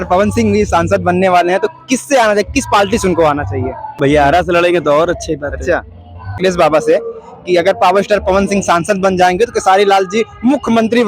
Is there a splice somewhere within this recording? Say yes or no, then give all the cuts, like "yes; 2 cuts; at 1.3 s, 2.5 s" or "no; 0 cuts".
yes; 2 cuts; at 4.0 s, 6.4 s